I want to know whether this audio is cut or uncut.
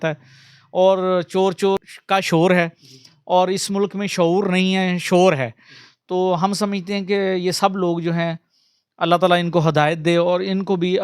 cut